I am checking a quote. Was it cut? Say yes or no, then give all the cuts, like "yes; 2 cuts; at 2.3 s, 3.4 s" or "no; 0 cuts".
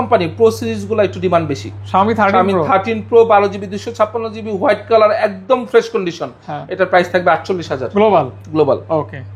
no; 0 cuts